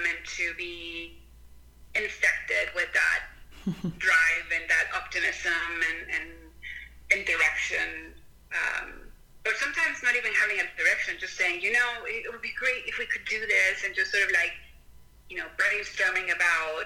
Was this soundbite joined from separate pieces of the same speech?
no; 0 cuts

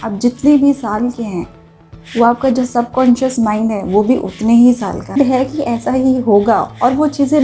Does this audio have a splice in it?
yes; 1 cut; at 5.2 s

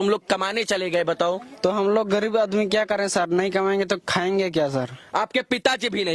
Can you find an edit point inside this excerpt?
no; 0 cuts

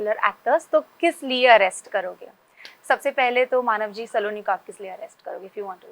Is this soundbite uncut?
yes; 0 cuts

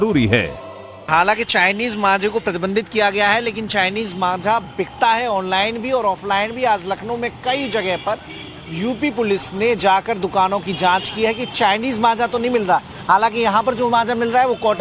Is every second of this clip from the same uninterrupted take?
yes; 0 cuts

